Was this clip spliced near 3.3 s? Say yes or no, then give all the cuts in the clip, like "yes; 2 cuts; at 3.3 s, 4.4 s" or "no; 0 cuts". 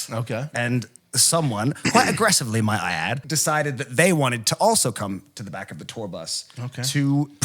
yes; 1 cut; at 3.3 s